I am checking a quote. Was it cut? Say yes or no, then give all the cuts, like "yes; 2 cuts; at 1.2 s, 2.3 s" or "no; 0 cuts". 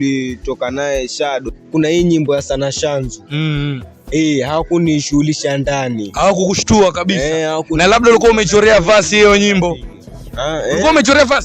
yes; 2 cuts; at 1.4 s, 10.1 s